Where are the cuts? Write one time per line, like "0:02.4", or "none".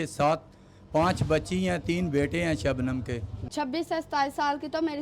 0:03.4